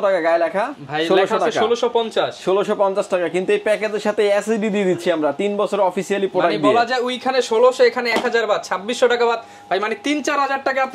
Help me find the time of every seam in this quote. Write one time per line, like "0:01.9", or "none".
none